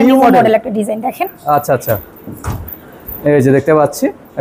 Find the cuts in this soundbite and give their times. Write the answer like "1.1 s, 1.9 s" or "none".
none